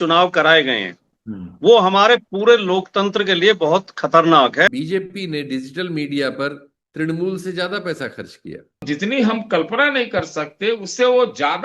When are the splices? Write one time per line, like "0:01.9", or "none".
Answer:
0:04.7
0:08.8